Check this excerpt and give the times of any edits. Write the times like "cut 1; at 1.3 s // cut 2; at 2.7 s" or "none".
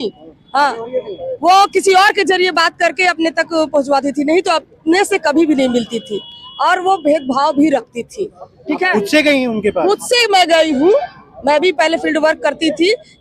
none